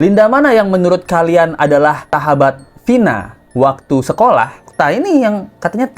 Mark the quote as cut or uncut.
cut